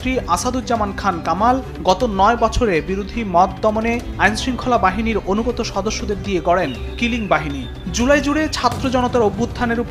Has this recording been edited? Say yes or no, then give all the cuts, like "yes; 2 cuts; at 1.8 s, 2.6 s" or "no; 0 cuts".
no; 0 cuts